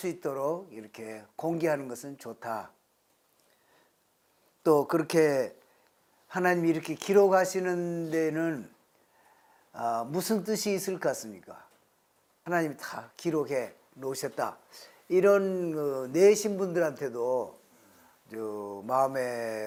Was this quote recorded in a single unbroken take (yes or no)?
yes